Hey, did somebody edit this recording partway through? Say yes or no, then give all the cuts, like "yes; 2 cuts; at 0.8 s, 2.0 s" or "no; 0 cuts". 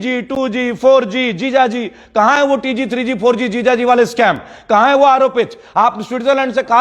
no; 0 cuts